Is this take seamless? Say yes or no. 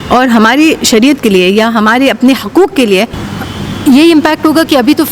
no